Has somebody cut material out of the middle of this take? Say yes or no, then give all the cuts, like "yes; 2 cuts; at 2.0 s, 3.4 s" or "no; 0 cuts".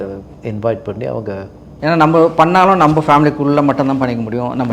yes; 1 cut; at 1.6 s